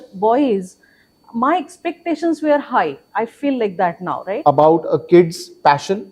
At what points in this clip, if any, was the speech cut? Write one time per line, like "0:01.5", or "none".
0:04.4